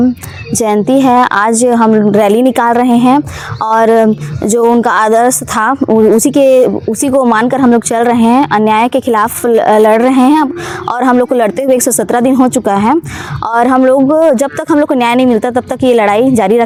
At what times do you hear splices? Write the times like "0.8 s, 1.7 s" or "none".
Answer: none